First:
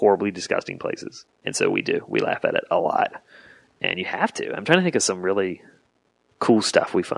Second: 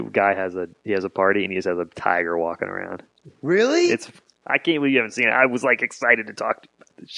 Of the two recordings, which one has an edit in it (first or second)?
first